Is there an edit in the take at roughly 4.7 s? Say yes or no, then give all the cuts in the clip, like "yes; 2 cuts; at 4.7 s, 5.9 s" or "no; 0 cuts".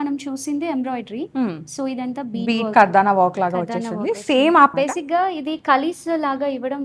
yes; 1 cut; at 4.7 s